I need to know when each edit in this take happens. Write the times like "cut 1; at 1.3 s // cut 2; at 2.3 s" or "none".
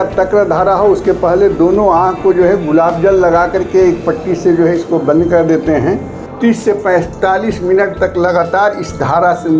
cut 1; at 6.2 s